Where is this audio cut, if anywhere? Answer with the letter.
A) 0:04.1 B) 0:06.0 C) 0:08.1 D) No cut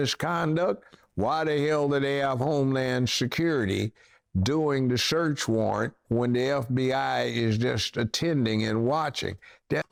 D